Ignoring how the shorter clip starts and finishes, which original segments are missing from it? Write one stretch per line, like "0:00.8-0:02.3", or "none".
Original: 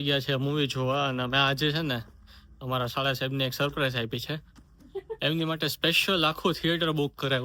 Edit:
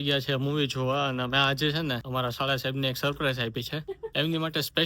0:02.0-0:02.6
0:04.4-0:04.9